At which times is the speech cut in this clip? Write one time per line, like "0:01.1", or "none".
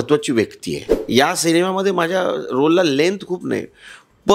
0:00.9